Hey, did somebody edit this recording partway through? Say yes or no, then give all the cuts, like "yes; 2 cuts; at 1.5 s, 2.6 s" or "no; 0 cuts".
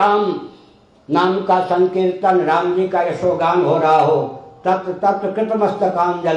no; 0 cuts